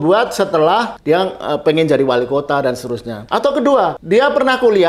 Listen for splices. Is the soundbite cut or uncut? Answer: cut